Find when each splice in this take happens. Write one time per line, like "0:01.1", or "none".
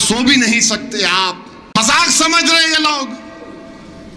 0:02.0